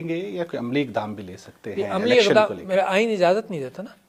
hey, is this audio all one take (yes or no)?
yes